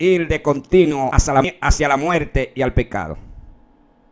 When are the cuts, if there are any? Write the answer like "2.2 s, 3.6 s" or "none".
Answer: 1.4 s